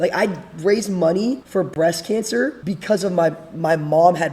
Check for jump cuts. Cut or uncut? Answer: cut